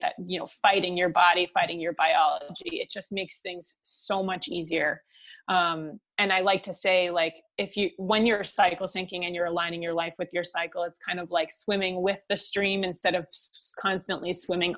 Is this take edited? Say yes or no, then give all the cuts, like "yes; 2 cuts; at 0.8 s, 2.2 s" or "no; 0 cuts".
no; 0 cuts